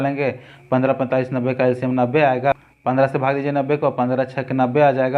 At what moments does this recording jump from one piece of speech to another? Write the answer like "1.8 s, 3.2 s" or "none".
2.5 s

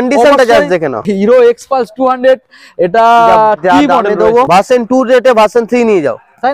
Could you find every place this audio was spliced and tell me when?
1.0 s, 4.5 s

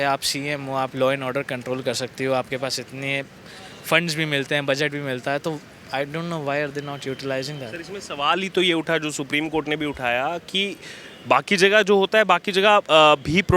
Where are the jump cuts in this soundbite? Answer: none

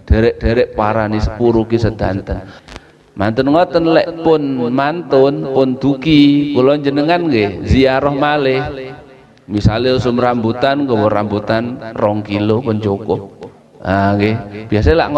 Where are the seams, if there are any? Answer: 2.6 s

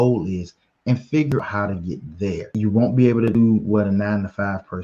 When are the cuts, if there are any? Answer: 2.5 s

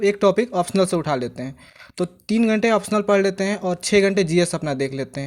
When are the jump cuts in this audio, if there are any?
none

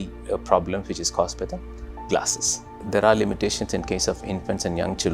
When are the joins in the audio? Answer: 2.8 s

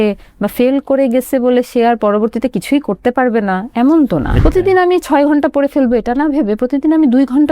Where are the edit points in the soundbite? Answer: 4.3 s

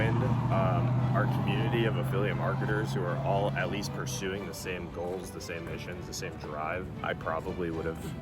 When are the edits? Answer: 6.9 s

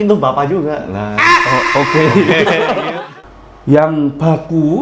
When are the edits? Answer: 2.9 s

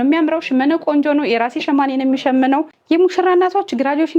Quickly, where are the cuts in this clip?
2.7 s

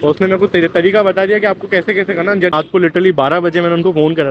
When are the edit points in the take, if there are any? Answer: 2.5 s

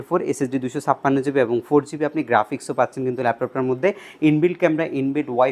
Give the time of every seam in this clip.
none

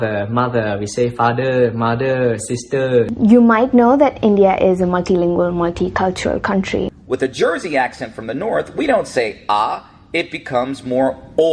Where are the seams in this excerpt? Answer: 3.1 s, 6.9 s

